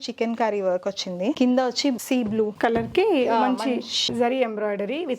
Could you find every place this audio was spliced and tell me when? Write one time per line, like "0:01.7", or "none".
0:01.4
0:02.5
0:04.1